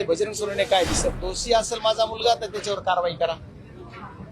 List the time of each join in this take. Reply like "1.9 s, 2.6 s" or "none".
1.2 s